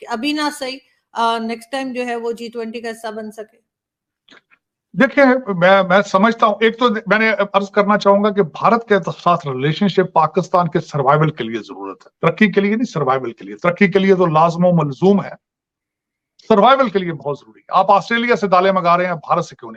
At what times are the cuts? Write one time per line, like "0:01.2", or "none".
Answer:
none